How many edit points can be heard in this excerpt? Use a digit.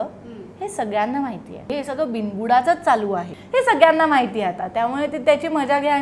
2